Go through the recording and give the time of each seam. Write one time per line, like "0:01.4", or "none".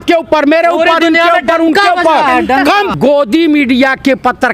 0:02.9